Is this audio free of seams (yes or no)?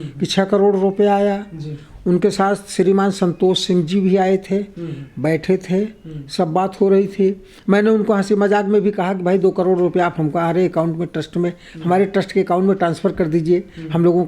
yes